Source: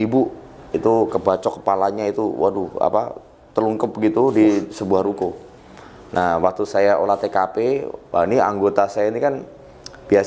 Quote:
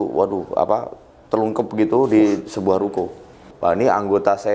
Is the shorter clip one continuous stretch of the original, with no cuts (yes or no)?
no